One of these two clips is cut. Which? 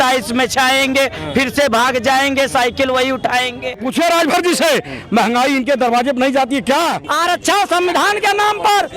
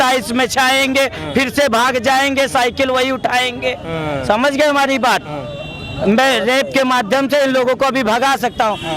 first; 2 cuts; at 3.8 s, 7.1 s

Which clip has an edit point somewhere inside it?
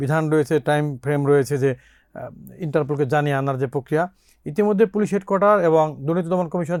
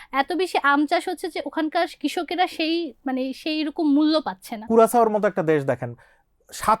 second; 1 cut; at 4.7 s

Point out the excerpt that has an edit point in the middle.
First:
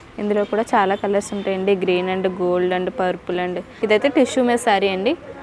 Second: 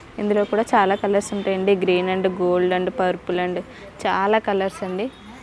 first; 1 cut; at 3.7 s

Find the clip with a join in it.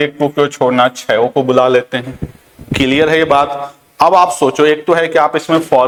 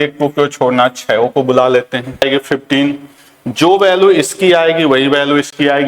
second; 1 cut; at 2.2 s

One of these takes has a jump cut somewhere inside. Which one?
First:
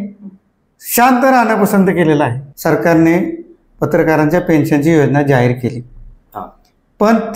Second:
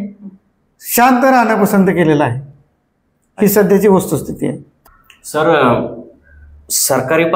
first; 1 cut; at 2.5 s

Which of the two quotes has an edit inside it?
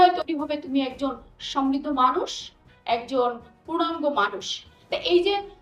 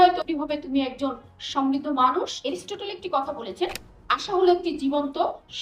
second; 1 cut; at 2.4 s

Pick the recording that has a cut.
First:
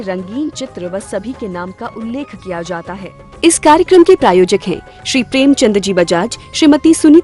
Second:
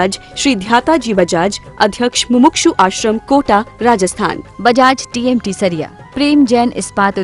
first; 1 cut; at 3.1 s

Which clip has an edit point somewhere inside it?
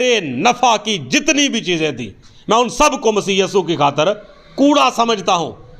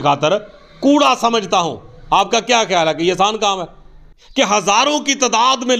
second; 1 cut; at 3.9 s

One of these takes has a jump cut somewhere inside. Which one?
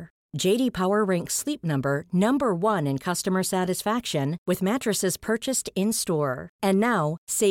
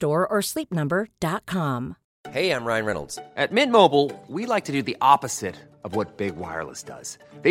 second; 1 cut; at 2.0 s

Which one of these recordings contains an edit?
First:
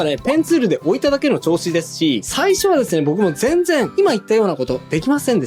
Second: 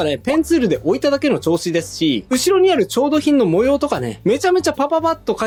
first; 1 cut; at 2.2 s

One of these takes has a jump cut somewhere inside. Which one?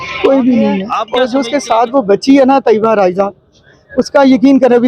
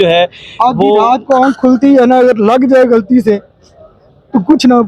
first; 1 cut; at 1.0 s

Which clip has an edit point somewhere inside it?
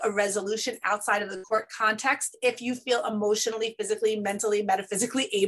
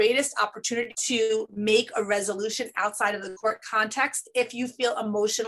second; 1 cut; at 1.0 s

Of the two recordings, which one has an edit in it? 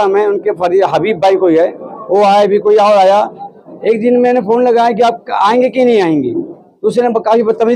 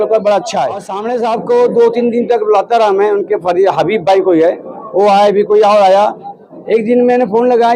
second; 1 cut; at 1.0 s

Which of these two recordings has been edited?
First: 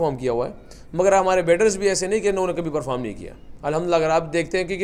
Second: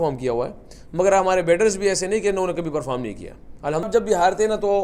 second; 1 cut; at 3.9 s

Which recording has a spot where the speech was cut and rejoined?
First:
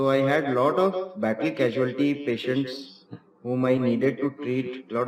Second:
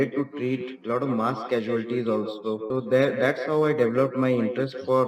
second; 1 cut; at 2.6 s

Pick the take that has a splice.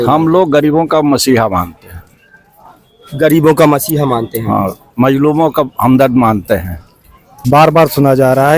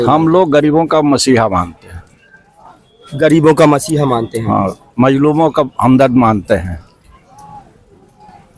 first; 1 cut; at 7.3 s

